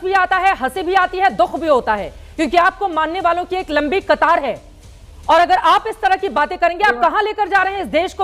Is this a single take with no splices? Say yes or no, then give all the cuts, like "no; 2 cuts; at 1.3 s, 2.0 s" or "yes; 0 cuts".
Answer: yes; 0 cuts